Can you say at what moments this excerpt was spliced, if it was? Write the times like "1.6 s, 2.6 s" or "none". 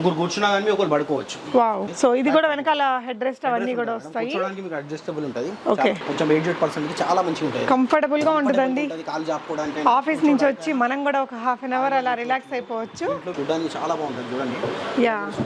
1.9 s, 6.0 s, 13.3 s